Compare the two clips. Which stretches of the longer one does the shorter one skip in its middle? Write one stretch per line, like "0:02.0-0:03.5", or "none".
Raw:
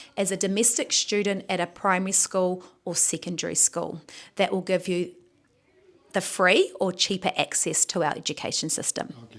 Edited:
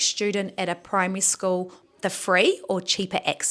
0:02.7-0:05.9